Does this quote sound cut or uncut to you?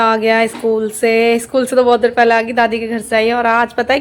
uncut